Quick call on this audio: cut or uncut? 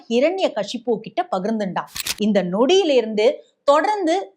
cut